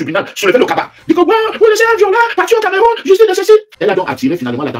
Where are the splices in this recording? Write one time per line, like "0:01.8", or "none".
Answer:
0:03.7